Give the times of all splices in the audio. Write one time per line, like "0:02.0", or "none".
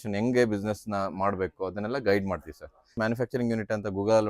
0:03.0